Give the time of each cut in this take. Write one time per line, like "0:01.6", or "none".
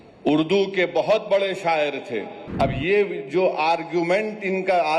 0:02.4